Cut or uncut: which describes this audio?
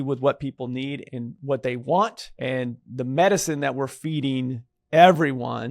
cut